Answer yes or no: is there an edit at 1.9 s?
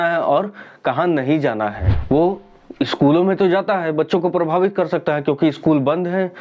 yes